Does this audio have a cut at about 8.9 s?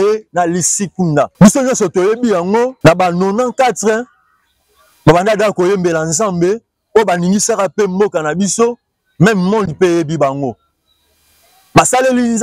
no; 2 cuts; at 1.3 s, 2.7 s

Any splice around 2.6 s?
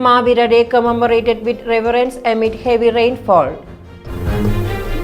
no; 1 cut; at 4.1 s

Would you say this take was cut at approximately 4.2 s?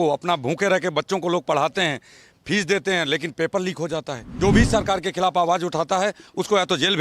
yes; 1 cut; at 4.2 s

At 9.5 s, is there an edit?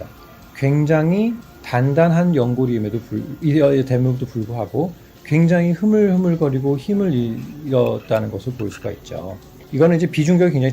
yes; 1 cut; at 9.5 s

